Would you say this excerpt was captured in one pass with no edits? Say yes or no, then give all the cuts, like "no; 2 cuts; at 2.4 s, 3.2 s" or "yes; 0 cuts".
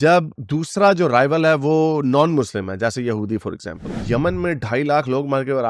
no; 1 cut; at 3.9 s